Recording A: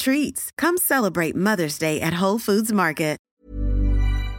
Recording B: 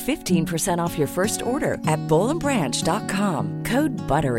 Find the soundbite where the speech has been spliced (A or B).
A